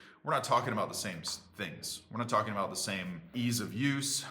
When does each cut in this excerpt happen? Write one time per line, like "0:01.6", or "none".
0:03.3